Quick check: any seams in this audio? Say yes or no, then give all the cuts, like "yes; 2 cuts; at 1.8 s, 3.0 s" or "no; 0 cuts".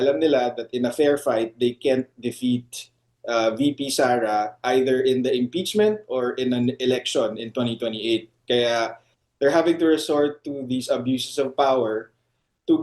yes; 1 cut; at 8.6 s